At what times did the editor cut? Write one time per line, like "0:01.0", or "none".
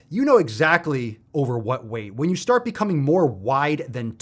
none